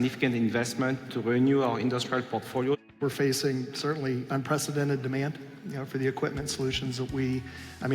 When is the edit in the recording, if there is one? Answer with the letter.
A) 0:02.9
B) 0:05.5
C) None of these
A